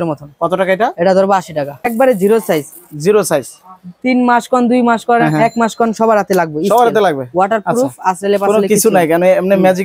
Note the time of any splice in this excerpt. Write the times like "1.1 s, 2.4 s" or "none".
1.9 s